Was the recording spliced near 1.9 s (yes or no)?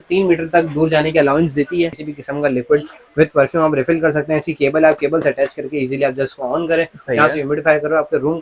yes